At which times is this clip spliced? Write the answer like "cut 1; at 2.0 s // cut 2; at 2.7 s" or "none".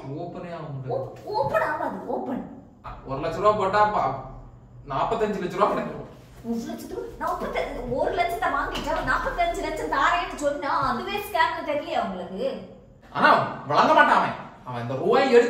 cut 1; at 2.9 s // cut 2; at 12.8 s